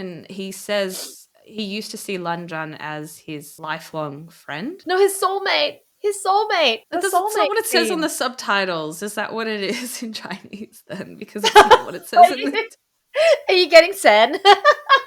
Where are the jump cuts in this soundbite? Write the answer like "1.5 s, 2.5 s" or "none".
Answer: none